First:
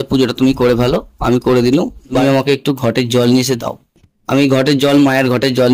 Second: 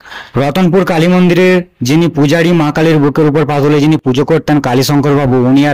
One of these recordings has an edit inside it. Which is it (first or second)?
first